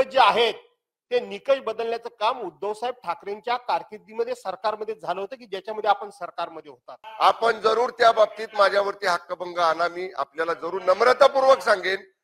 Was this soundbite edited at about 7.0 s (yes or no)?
yes